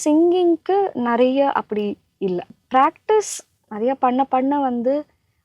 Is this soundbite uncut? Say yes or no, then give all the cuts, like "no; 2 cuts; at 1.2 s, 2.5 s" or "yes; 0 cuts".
no; 1 cut; at 2.5 s